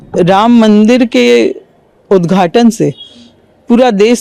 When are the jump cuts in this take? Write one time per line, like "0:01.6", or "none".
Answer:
none

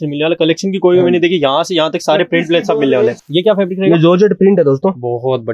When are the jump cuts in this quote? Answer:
0:03.2

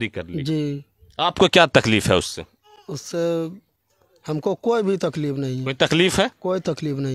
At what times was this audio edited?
none

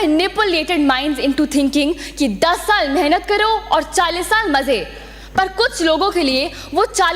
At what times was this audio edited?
none

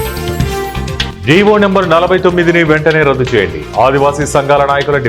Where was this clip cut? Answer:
0:01.1

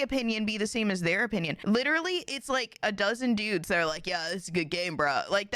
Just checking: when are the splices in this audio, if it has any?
0:01.5
0:02.8

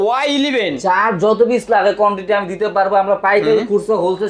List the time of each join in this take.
none

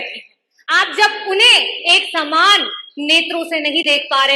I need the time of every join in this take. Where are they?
none

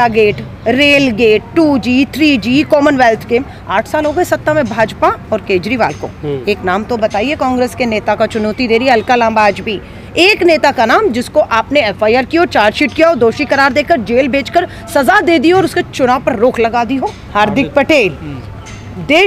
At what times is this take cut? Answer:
0:17.2

